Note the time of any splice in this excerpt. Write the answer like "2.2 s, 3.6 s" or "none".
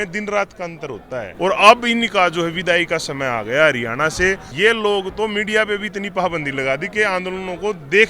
1.3 s, 4.5 s